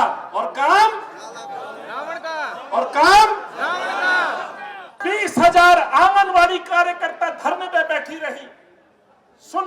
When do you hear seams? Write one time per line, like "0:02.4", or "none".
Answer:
0:05.0